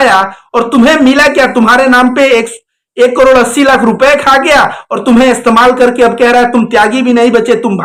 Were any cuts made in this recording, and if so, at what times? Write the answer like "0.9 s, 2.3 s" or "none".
none